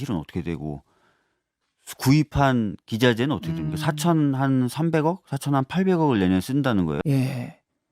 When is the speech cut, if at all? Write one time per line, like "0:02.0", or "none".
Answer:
0:07.0